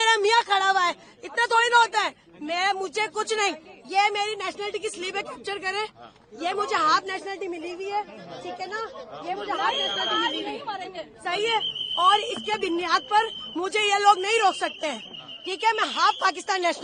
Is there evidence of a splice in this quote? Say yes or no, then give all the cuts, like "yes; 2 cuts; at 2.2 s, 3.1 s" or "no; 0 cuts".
no; 0 cuts